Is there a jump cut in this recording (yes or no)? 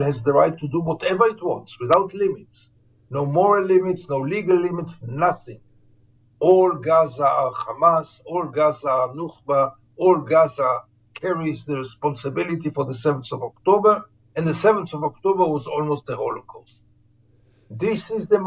no